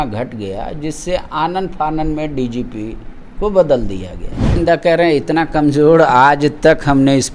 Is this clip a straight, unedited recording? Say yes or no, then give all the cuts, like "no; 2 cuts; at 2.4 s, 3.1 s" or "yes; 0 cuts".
no; 1 cut; at 4.6 s